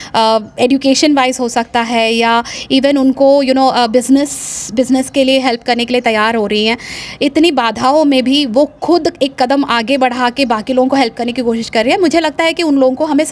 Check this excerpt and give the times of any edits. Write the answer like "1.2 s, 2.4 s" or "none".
none